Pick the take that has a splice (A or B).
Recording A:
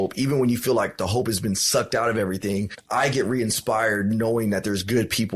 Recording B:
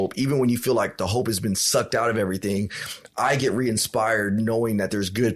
A